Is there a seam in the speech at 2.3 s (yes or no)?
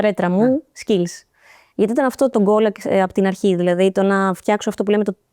yes